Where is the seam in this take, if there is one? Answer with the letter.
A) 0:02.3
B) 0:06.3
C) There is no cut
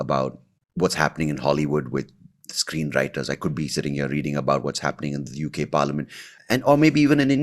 B